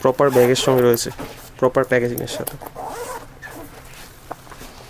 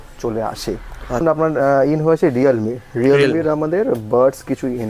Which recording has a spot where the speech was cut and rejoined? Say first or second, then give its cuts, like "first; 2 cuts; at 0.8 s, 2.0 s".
second; 1 cut; at 1.2 s